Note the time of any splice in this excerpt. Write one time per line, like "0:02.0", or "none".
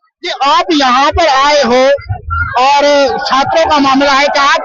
none

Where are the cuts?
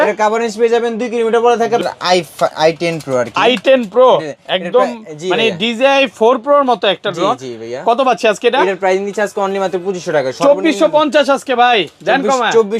0:01.8

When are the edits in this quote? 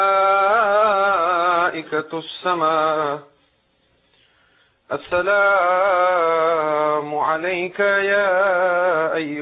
none

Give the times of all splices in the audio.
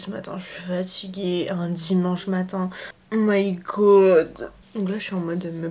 0:04.5

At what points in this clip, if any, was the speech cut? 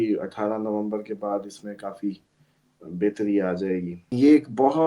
0:04.0

